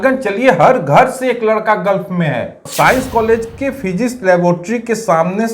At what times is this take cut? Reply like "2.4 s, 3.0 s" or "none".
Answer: 2.7 s